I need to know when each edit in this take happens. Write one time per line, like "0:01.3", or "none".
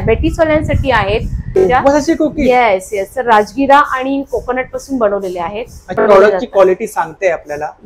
0:01.6
0:06.0